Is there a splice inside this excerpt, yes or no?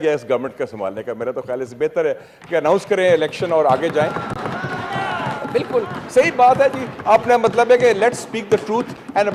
no